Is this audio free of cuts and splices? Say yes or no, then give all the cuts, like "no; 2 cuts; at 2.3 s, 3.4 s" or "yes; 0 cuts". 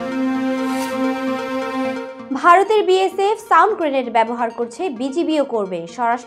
no; 1 cut; at 2.1 s